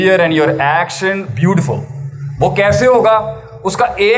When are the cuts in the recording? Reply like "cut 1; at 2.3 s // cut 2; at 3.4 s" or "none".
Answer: none

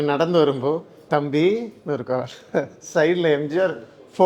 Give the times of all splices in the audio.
cut 1; at 0.9 s

